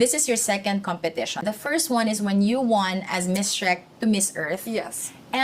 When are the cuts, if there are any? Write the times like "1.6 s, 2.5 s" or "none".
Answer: 1.4 s